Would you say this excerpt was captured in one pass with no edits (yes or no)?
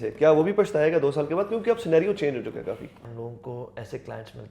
no